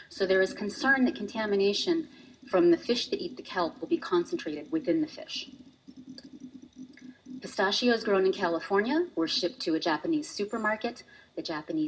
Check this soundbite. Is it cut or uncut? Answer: uncut